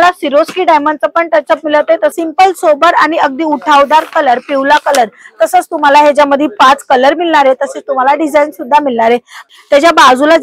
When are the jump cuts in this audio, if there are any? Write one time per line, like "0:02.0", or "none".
0:02.1
0:09.5